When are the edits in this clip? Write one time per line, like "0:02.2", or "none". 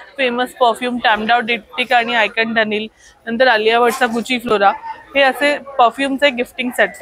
none

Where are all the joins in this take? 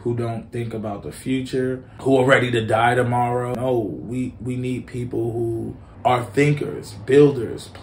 0:01.9
0:03.5
0:05.8

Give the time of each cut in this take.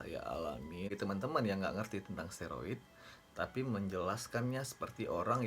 0:00.9

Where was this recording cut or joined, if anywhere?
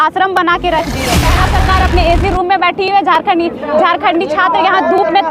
0:01.4

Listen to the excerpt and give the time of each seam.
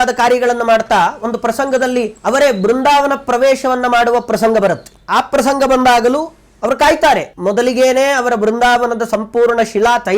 0:02.1
0:07.3

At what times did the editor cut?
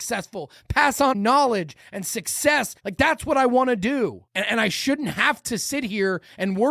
0:01.1
0:02.8
0:04.2

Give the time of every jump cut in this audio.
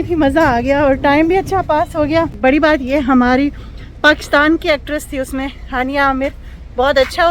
0:02.3

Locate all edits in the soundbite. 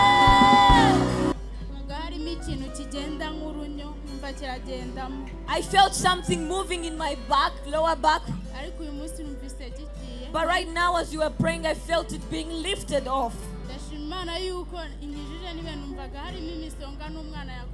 0:01.3

